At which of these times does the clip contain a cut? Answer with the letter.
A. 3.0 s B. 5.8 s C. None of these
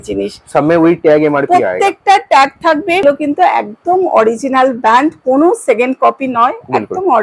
A